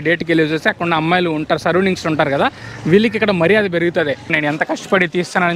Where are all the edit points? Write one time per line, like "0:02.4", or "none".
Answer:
0:04.3